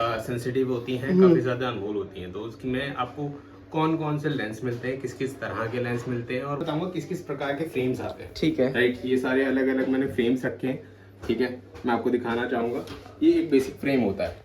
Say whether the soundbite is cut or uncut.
cut